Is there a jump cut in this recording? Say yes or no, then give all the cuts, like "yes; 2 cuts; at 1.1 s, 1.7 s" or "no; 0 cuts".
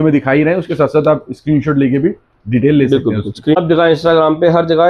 yes; 1 cut; at 3.5 s